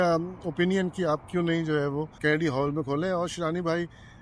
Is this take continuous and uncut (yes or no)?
no